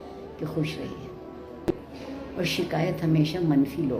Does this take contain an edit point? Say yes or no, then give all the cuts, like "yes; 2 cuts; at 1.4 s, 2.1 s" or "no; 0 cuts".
no; 0 cuts